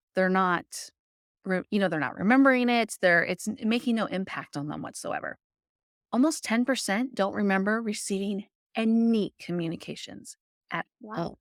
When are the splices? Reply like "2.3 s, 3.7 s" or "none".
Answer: none